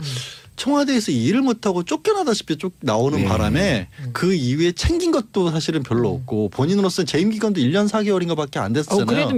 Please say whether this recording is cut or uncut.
uncut